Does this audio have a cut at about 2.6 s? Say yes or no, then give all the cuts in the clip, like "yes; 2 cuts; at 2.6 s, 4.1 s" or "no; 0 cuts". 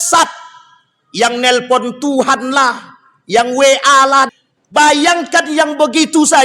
no; 1 cut; at 4.3 s